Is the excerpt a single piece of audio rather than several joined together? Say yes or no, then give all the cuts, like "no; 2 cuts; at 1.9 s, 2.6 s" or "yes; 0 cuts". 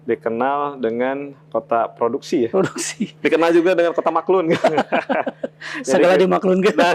yes; 0 cuts